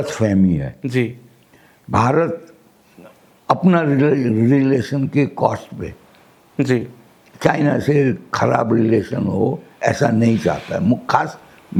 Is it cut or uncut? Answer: uncut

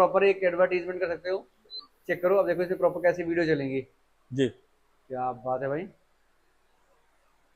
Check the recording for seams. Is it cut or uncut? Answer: uncut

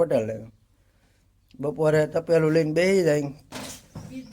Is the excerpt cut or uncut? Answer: cut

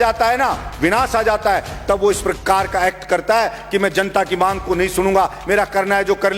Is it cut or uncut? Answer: uncut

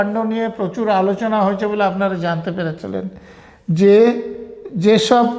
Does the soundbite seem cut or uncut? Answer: uncut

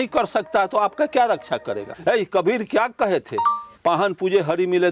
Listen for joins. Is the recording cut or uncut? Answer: cut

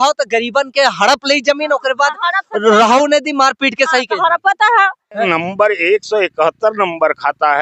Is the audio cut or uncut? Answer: cut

